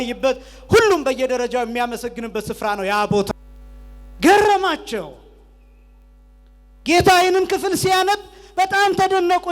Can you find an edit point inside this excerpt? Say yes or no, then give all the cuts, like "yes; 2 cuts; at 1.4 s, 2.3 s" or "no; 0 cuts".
yes; 1 cut; at 3.3 s